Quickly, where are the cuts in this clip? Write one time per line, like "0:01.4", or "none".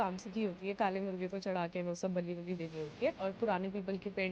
0:03.2